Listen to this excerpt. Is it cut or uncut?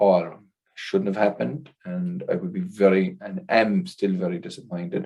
uncut